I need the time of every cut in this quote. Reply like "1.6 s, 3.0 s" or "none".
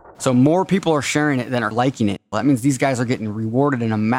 1.9 s